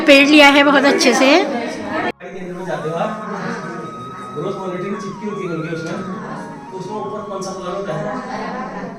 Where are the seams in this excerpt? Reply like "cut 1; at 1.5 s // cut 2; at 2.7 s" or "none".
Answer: none